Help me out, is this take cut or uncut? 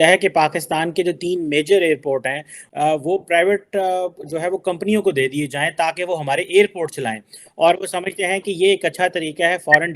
uncut